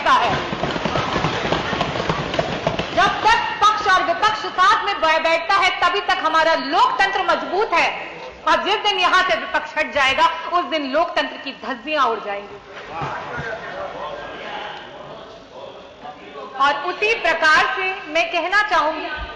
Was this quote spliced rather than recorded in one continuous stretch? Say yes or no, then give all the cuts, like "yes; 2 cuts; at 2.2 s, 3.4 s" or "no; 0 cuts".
no; 0 cuts